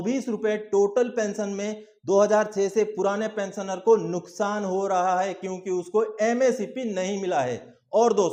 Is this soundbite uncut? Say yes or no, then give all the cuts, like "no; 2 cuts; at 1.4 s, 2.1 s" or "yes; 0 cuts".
yes; 0 cuts